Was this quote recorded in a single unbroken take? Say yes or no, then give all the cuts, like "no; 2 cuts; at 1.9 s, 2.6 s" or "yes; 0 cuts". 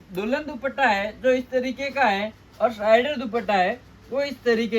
yes; 0 cuts